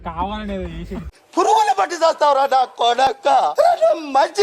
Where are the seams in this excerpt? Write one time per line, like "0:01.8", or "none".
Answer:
0:01.2
0:03.5

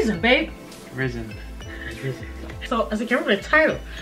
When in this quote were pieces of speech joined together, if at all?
none

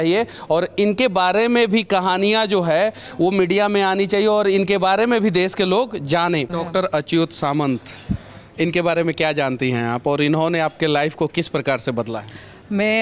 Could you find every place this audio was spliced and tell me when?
0:06.5

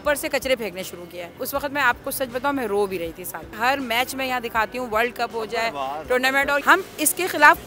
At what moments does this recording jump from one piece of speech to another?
0:01.4
0:03.6
0:06.6

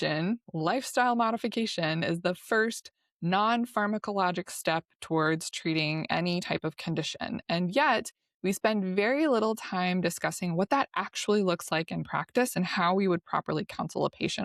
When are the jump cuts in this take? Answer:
none

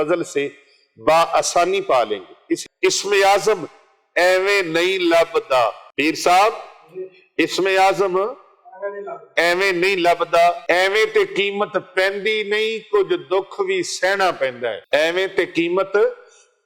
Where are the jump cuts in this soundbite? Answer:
0:02.7
0:05.8
0:10.6
0:14.8

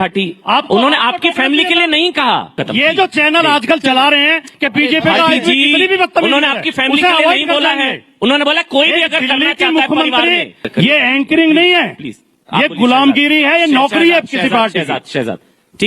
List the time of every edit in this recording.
0:02.6
0:10.6

